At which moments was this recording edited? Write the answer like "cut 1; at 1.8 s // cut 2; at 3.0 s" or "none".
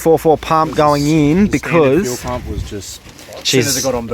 none